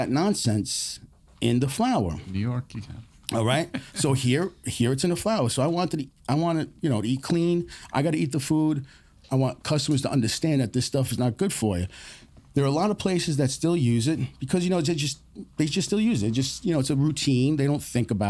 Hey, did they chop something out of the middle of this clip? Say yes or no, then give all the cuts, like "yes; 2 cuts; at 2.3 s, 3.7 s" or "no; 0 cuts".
no; 0 cuts